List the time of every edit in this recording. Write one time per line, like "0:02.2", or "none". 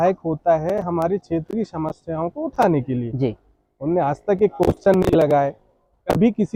none